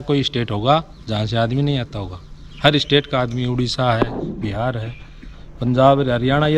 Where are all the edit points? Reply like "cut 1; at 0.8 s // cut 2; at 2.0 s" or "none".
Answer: none